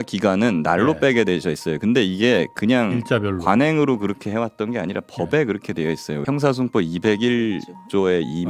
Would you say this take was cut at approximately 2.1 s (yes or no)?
no